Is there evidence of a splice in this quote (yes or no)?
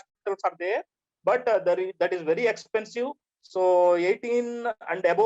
yes